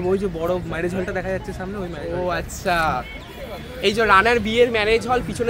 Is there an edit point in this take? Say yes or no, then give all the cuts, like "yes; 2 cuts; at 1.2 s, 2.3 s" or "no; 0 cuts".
no; 0 cuts